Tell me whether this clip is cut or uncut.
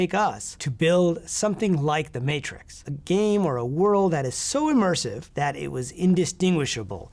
cut